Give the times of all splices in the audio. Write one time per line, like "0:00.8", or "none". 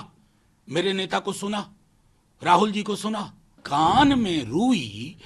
0:03.6